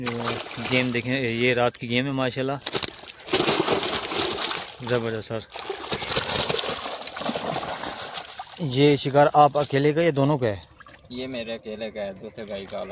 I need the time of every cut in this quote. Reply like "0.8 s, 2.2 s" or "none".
none